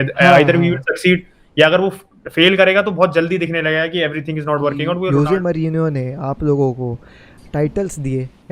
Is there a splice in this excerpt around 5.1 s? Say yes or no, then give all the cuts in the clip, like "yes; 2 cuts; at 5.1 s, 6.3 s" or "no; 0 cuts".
yes; 1 cut; at 5.1 s